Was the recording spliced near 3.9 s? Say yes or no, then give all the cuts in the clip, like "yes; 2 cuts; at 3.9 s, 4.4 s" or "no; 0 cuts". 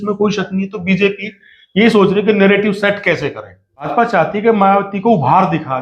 yes; 1 cut; at 3.9 s